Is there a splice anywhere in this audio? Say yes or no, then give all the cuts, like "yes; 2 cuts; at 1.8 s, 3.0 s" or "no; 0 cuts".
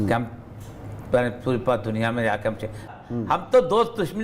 yes; 1 cut; at 2.8 s